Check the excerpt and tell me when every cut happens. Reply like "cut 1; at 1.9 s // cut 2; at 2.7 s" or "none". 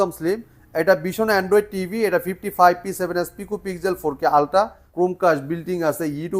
cut 1; at 4.8 s